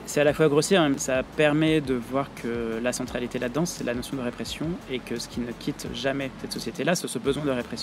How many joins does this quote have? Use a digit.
2